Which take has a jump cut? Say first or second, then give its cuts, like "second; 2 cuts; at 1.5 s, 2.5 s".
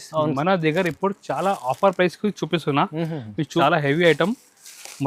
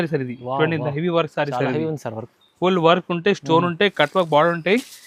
first; 1 cut; at 3.6 s